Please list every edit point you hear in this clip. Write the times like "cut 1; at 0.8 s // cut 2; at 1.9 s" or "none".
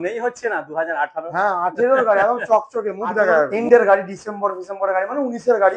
cut 1; at 3.5 s